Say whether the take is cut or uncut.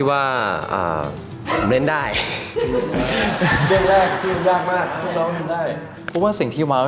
cut